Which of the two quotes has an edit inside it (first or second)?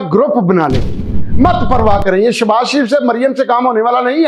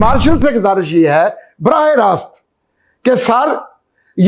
first